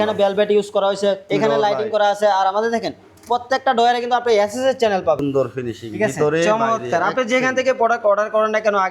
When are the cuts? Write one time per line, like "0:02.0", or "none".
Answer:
0:01.2
0:05.2